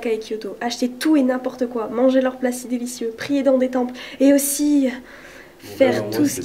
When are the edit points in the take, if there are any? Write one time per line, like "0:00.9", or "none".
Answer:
none